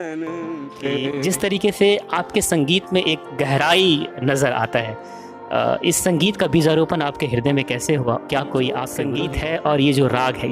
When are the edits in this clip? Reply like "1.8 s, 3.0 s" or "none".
1.0 s, 9.1 s